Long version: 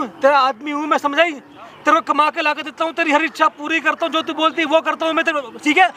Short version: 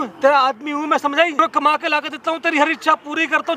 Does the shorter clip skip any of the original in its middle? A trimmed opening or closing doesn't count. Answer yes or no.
yes